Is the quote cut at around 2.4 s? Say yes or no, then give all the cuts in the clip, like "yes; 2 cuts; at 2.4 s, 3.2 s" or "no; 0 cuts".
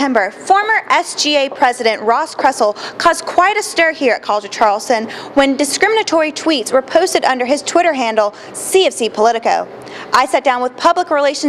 no; 0 cuts